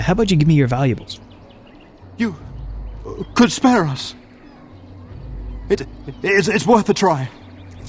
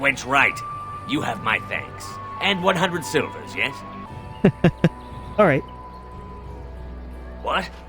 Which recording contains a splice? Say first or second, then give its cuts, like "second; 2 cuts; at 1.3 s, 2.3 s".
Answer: second; 1 cut; at 4.1 s